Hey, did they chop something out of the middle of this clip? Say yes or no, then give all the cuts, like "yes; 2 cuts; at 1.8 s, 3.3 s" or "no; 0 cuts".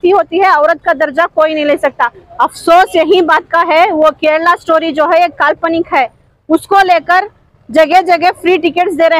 yes; 1 cut; at 2.2 s